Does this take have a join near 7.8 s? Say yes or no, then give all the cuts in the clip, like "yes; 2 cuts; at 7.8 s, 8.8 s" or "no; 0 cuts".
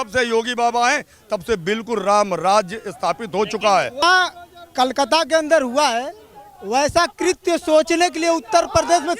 no; 1 cut; at 4.0 s